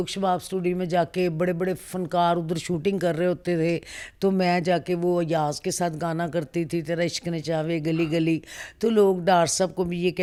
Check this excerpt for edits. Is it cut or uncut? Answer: uncut